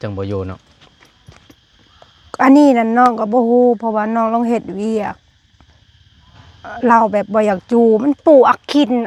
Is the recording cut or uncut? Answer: uncut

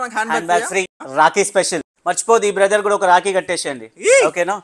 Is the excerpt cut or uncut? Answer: cut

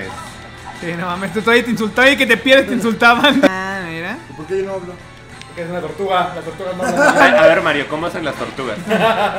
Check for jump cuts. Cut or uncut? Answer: cut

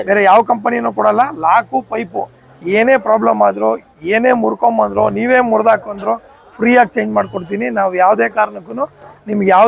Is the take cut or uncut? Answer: uncut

